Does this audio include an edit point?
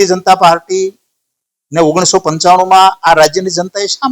no; 0 cuts

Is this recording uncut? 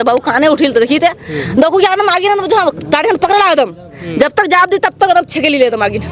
yes; 0 cuts

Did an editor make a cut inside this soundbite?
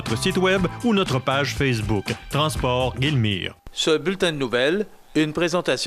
yes; 1 cut; at 3.5 s

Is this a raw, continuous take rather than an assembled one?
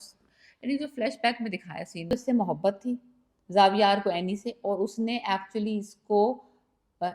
no; 1 cut; at 2.1 s

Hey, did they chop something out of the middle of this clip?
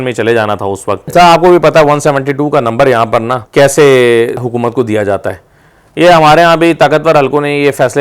yes; 3 cuts; at 1.1 s, 3.4 s, 4.4 s

